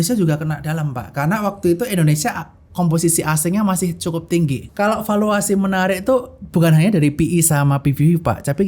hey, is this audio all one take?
no; 1 cut; at 4.6 s

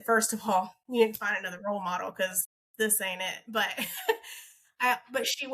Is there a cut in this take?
no; 0 cuts

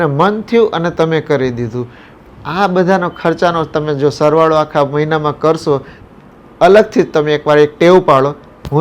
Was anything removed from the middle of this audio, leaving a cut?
no; 0 cuts

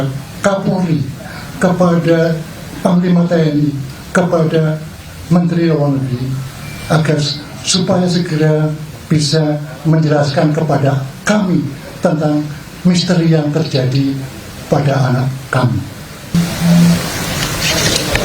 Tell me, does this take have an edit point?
yes; 1 cut; at 16.3 s

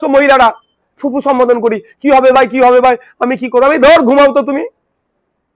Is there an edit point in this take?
no; 0 cuts

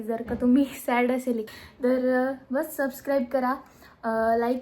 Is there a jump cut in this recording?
yes; 1 cut; at 1.5 s

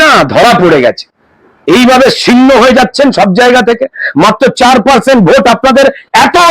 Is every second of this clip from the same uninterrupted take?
yes; 0 cuts

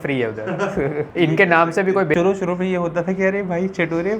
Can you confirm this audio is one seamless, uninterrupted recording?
no; 1 cut; at 2.1 s

